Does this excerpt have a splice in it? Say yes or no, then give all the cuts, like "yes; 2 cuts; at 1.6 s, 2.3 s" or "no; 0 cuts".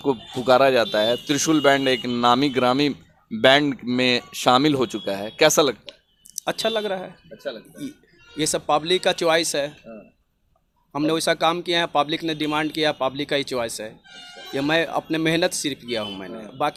no; 0 cuts